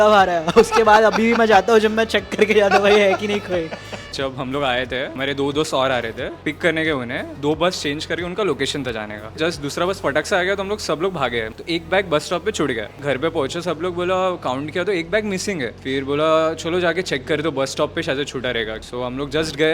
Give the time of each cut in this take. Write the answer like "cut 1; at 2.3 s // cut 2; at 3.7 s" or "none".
cut 1; at 4.1 s // cut 2; at 5.1 s // cut 3; at 6.4 s // cut 4; at 7.3 s // cut 5; at 9.4 s // cut 6; at 11.6 s // cut 7; at 13.0 s // cut 8; at 15.8 s // cut 9; at 18.8 s